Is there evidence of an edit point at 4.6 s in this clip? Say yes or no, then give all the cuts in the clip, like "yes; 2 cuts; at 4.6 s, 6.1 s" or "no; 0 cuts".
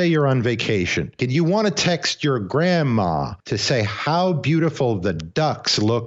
no; 2 cuts; at 1.2 s, 3.3 s